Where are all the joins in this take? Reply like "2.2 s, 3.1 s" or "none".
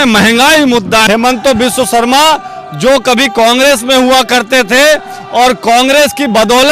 1.0 s

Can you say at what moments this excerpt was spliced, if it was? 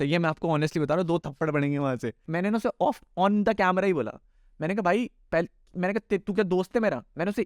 2.2 s

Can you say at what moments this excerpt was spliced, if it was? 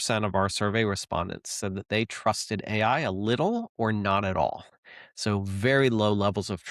none

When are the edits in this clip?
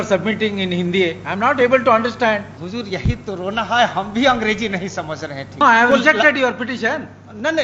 2.6 s, 5.6 s

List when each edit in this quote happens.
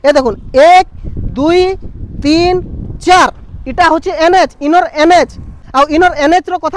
5.6 s

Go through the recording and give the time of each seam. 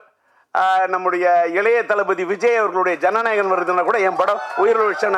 none

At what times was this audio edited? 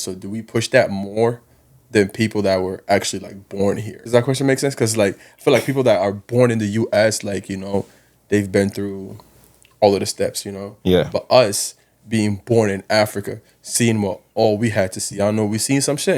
3.9 s

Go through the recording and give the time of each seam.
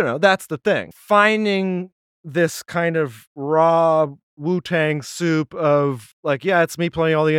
0.9 s, 3.3 s, 4.3 s, 6.1 s

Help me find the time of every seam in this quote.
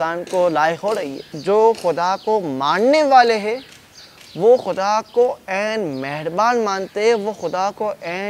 1.3 s

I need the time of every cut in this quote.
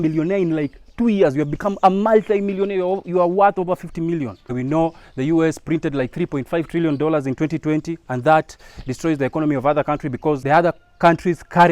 4.5 s, 10.4 s

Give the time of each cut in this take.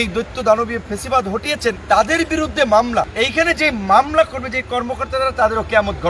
1.8 s, 3.1 s

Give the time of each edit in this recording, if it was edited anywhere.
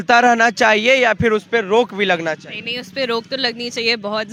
none

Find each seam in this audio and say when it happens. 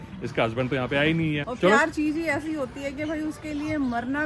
1.4 s

